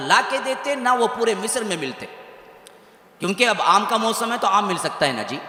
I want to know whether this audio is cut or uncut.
uncut